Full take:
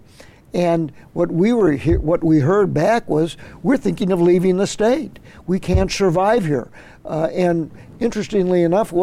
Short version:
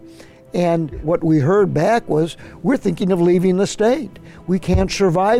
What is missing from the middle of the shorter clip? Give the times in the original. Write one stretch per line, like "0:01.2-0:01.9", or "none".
0:01.0-0:02.0

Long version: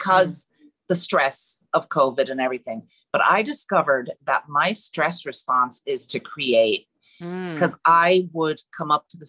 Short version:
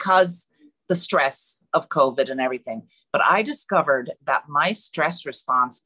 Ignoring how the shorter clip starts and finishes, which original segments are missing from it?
none

